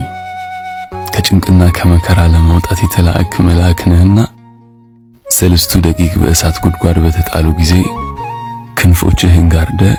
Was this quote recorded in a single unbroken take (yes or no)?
yes